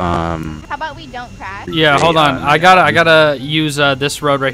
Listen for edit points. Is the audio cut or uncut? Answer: uncut